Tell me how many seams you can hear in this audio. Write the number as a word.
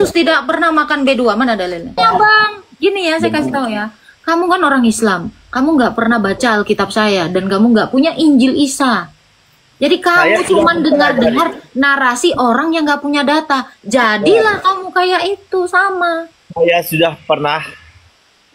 one